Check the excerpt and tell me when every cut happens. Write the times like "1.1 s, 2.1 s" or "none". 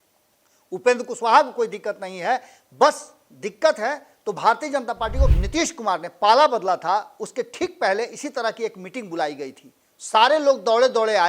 5.3 s

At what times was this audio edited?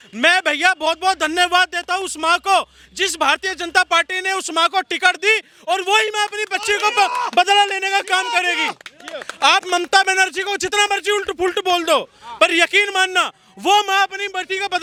none

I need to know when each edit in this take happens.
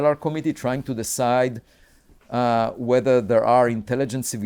none

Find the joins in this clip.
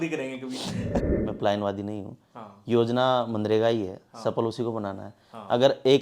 1.0 s

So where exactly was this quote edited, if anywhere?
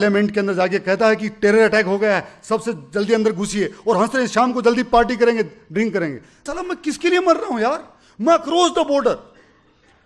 6.4 s

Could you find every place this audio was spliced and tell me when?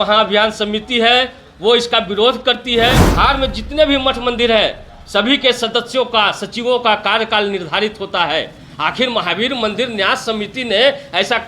3.0 s

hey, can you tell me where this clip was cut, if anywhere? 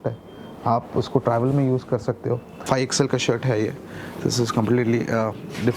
2.6 s

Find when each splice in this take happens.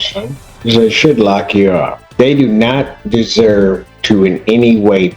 2.1 s

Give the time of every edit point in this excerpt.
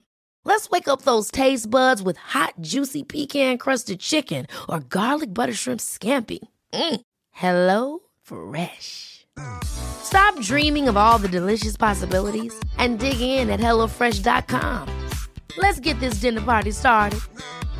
none

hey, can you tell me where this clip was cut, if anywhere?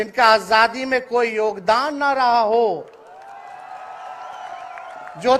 none

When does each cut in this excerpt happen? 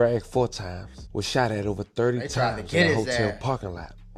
none

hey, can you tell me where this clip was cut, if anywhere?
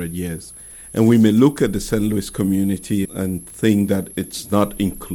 none

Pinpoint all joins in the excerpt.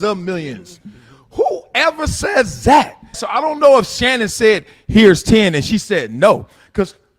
3.2 s

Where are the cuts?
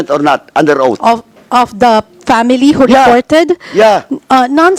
none

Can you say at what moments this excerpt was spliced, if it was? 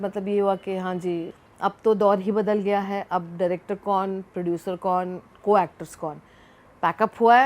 1.4 s

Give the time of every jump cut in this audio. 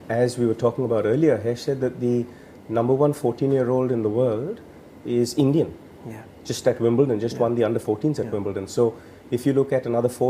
none

